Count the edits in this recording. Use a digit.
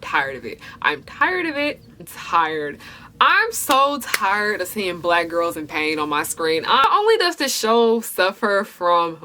2